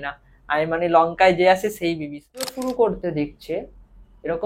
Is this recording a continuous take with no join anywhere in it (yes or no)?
no